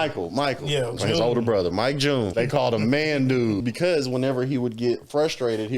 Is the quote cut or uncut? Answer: cut